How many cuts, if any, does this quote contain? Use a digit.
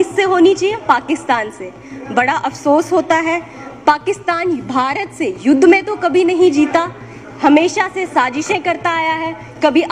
0